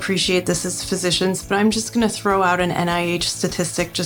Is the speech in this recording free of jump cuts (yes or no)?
yes